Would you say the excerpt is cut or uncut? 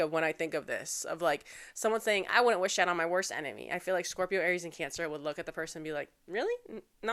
uncut